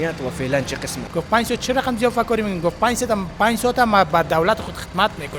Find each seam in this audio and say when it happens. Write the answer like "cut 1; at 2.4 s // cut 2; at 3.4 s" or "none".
cut 1; at 1.0 s